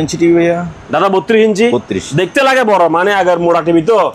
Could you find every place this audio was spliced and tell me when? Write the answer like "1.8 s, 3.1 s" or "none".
none